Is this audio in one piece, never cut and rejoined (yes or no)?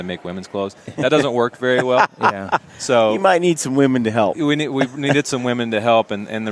yes